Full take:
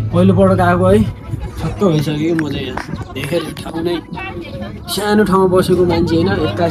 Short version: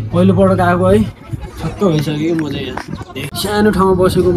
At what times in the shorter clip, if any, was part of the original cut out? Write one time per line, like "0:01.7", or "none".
0:03.2